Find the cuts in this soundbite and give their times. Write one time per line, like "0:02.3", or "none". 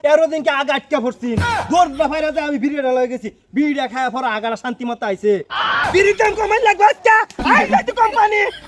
0:05.8